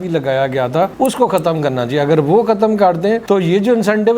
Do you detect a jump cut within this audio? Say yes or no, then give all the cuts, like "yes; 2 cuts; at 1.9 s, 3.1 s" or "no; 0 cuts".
no; 0 cuts